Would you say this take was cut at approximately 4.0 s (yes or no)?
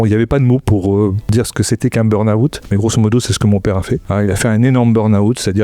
yes